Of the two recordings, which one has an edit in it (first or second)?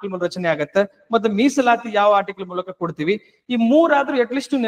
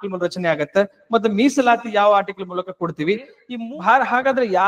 second